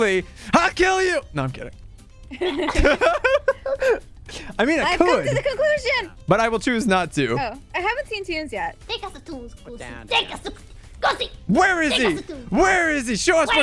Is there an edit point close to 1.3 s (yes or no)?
no